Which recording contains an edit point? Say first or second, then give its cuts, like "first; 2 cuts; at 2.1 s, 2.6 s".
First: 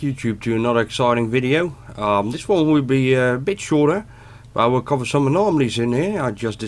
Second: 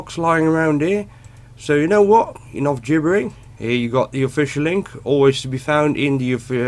second; 1 cut; at 3.1 s